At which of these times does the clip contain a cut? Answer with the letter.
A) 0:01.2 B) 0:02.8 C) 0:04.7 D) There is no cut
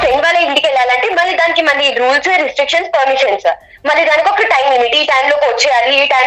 D